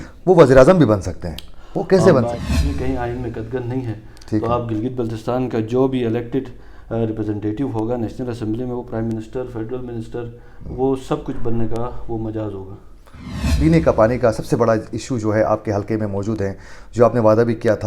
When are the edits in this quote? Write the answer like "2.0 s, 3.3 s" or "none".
2.3 s, 13.4 s